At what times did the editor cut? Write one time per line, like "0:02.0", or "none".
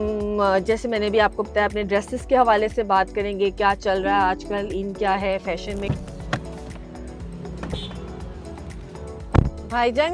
0:05.9